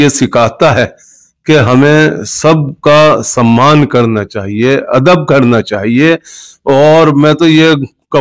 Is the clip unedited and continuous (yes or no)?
yes